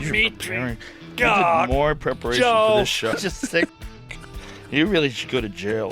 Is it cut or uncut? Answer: cut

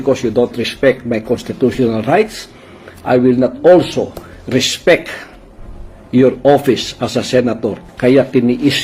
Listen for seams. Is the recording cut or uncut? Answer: cut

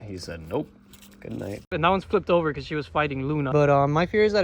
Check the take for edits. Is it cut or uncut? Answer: cut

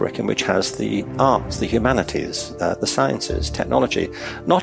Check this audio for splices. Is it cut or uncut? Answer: uncut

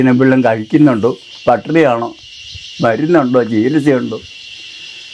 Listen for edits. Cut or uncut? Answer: uncut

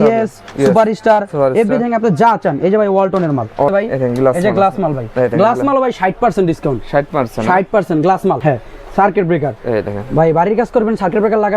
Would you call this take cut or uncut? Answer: cut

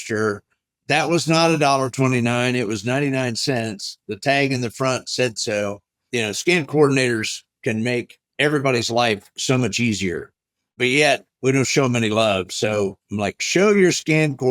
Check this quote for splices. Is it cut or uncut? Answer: cut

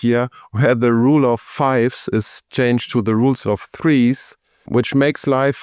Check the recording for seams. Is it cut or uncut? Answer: uncut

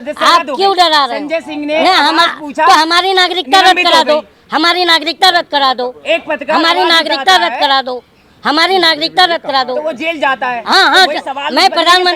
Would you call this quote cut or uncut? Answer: uncut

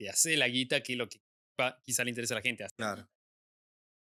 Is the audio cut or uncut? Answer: uncut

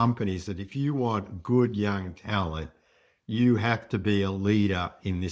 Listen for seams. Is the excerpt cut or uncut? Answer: uncut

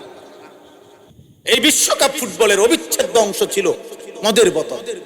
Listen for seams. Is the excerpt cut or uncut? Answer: cut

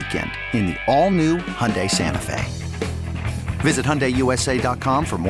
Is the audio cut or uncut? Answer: uncut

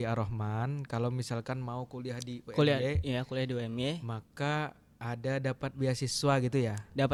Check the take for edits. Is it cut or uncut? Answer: uncut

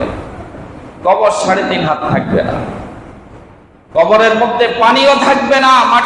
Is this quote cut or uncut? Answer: uncut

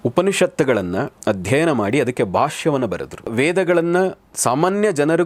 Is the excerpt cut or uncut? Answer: cut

